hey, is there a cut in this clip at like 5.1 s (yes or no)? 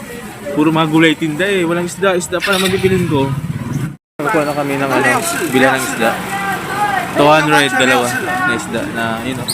no